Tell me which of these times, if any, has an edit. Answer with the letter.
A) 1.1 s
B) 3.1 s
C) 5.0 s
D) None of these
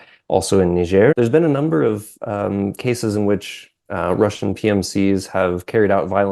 A